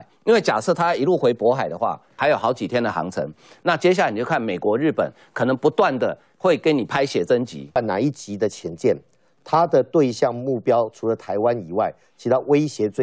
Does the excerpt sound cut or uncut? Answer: cut